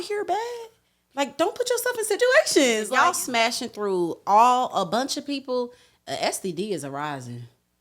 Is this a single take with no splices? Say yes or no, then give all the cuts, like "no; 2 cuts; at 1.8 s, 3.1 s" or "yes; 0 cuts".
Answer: no; 1 cut; at 2.8 s